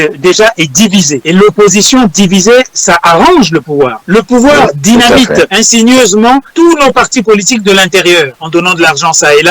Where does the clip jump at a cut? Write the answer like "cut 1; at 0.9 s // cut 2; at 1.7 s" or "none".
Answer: cut 1; at 1.2 s // cut 2; at 4.0 s // cut 3; at 5.6 s // cut 4; at 6.5 s // cut 5; at 8.4 s